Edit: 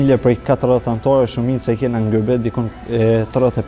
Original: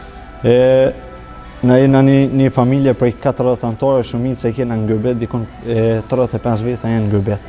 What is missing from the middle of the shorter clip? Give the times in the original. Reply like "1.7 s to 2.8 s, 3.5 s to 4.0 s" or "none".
none